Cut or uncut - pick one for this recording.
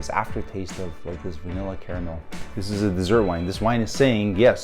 cut